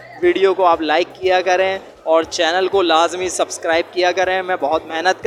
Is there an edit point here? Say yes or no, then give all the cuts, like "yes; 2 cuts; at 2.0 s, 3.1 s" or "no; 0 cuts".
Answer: no; 0 cuts